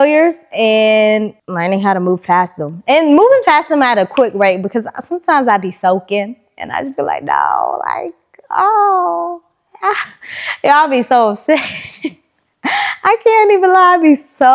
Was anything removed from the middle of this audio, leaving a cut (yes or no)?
yes